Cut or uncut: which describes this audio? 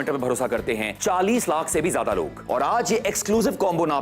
cut